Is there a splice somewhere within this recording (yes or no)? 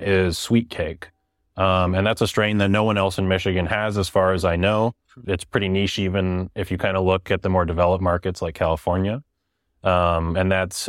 no